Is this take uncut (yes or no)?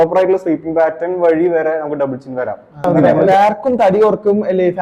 no